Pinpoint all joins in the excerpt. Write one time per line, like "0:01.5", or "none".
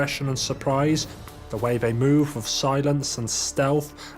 0:01.3